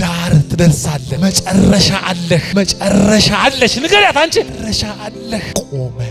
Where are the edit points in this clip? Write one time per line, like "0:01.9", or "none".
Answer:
none